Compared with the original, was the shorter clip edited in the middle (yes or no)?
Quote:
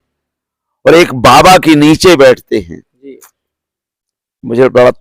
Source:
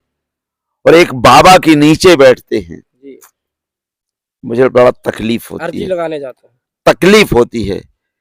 no